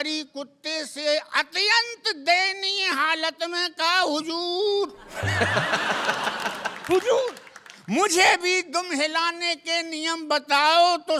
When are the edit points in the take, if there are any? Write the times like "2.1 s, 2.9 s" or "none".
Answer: none